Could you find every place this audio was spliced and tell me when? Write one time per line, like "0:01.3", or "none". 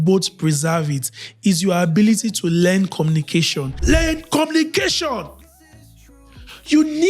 0:03.7